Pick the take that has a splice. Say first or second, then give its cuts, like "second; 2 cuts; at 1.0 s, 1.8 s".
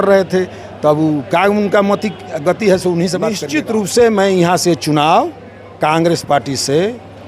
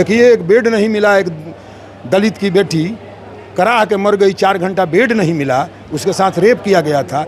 first; 1 cut; at 3.4 s